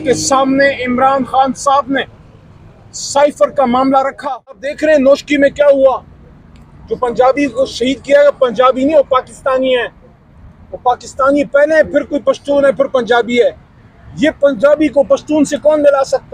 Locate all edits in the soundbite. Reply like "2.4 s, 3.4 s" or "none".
4.7 s